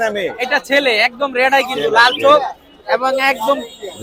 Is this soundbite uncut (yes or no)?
yes